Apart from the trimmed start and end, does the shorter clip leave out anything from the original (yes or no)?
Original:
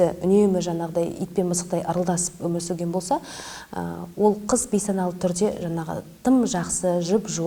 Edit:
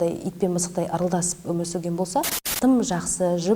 yes